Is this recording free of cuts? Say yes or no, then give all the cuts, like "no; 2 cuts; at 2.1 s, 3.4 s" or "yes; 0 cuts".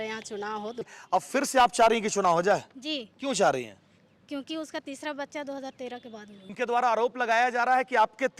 no; 2 cuts; at 0.9 s, 6.5 s